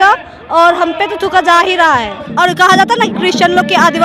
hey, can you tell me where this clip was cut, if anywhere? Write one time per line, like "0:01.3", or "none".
0:02.2